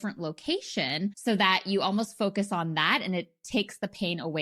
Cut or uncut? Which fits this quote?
uncut